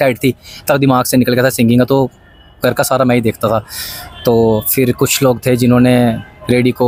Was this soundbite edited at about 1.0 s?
no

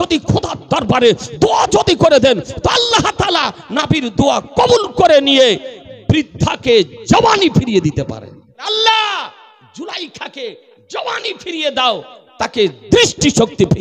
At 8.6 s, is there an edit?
yes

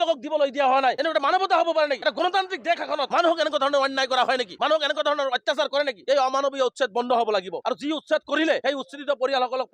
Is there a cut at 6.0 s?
yes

